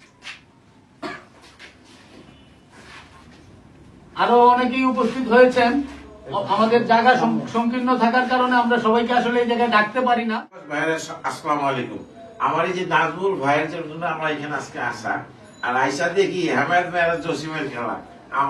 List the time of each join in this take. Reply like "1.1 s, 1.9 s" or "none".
10.7 s